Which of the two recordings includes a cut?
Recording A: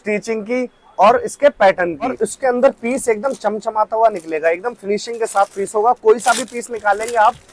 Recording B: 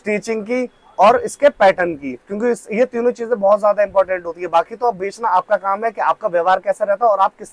A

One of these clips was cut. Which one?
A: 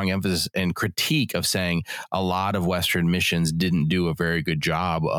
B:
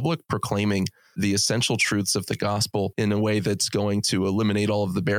B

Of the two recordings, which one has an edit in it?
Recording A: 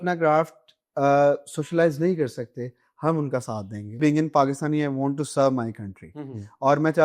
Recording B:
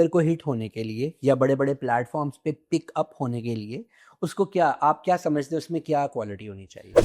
A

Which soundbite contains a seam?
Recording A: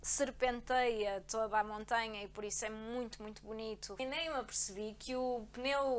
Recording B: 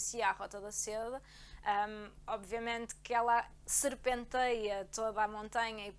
A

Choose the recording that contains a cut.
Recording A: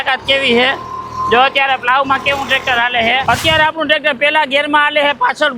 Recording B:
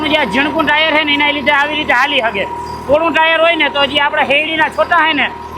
A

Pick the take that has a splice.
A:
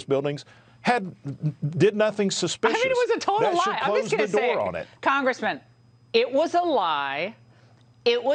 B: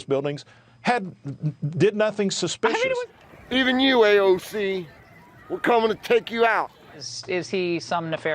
B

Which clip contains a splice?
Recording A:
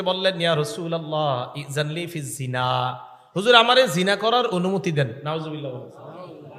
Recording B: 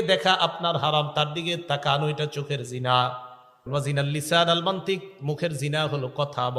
B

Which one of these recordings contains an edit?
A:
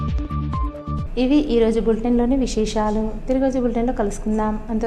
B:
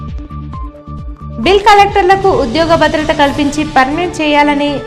B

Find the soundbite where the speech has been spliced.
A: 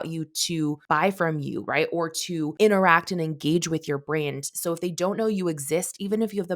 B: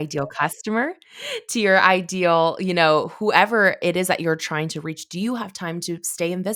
A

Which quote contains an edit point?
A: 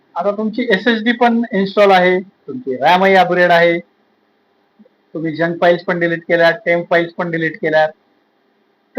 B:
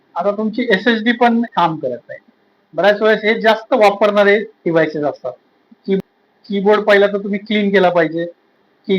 B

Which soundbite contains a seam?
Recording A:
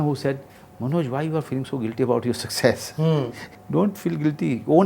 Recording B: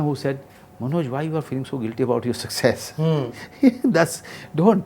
A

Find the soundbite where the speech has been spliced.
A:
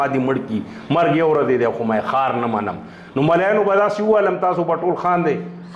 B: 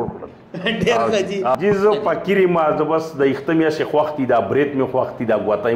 B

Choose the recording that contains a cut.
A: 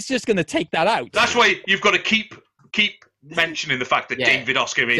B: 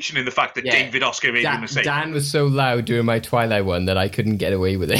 A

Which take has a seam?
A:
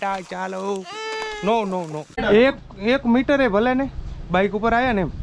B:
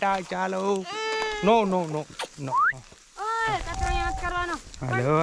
A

